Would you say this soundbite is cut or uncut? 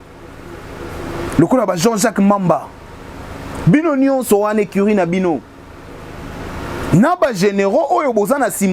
uncut